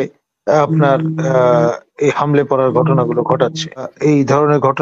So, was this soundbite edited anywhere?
yes; 1 cut; at 3.9 s

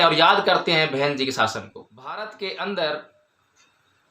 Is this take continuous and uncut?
no; 1 cut; at 2.2 s

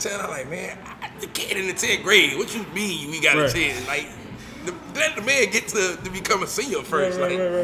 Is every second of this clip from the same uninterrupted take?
yes; 0 cuts

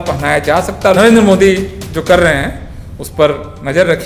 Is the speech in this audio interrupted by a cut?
yes; 1 cut; at 1.0 s

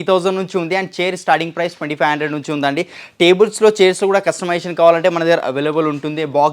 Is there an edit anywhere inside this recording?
no; 0 cuts

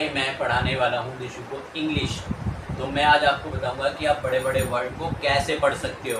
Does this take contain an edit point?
no; 0 cuts

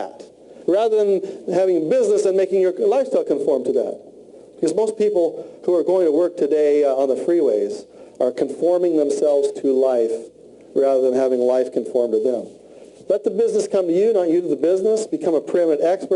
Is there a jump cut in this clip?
yes; 1 cut; at 1.4 s

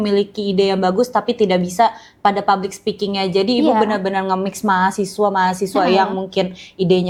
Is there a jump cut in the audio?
no; 0 cuts

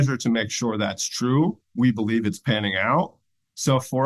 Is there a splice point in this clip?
yes; 1 cut; at 1.7 s

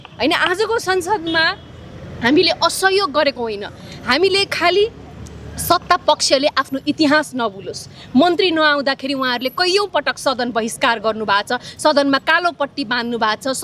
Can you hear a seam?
no; 0 cuts

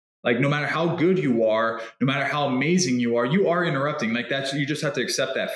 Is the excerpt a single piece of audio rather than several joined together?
yes; 0 cuts

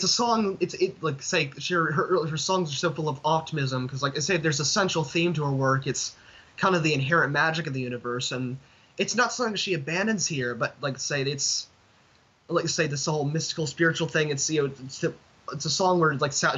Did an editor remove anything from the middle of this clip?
no; 0 cuts

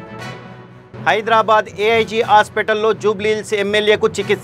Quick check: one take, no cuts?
yes; 0 cuts

